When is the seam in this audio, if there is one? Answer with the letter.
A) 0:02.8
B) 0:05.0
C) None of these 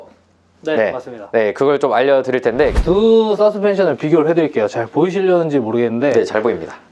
A